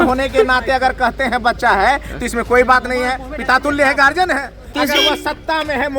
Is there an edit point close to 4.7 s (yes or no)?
yes